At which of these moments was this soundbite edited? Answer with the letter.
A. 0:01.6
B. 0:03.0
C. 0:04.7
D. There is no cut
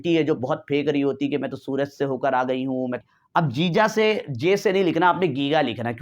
B